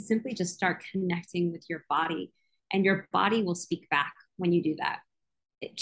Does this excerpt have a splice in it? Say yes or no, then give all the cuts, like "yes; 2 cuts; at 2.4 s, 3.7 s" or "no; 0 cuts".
no; 0 cuts